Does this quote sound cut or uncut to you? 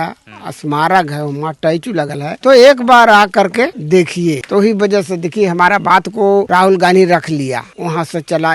cut